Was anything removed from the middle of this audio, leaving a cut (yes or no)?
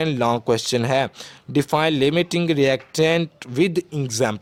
no